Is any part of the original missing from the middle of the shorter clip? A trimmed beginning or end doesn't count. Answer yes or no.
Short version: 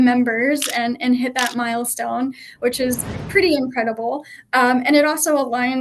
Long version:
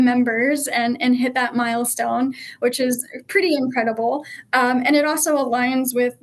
no